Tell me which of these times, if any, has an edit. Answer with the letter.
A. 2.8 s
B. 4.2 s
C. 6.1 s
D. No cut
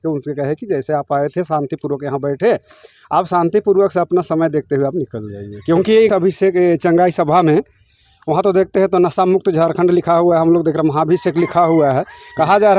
C